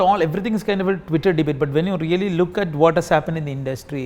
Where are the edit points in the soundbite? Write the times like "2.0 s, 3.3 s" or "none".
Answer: none